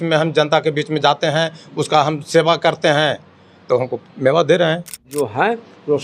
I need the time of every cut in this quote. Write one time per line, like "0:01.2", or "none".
0:05.1